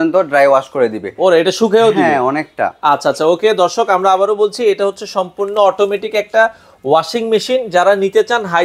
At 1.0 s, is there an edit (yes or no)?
no